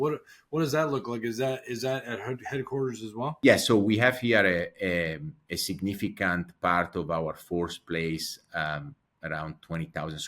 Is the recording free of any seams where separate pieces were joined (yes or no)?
no